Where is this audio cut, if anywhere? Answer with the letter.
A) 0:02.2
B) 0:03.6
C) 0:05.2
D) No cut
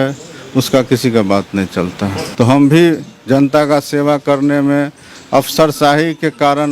A